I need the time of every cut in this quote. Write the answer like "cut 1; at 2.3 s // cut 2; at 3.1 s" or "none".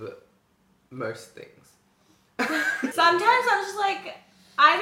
cut 1; at 2.9 s